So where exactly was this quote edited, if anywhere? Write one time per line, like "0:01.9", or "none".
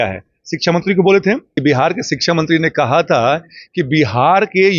0:01.6